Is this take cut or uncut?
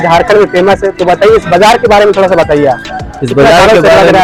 uncut